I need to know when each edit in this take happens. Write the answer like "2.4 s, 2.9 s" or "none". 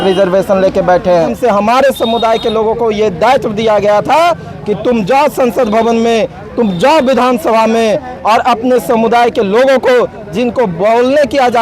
1.3 s